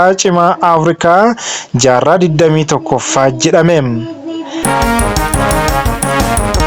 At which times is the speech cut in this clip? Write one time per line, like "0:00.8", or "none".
0:04.5